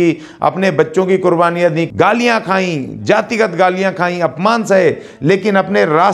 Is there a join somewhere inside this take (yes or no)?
yes